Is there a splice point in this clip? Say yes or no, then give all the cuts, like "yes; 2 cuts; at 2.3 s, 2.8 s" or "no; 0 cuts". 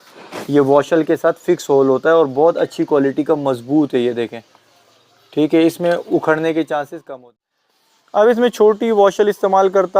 yes; 1 cut; at 7.4 s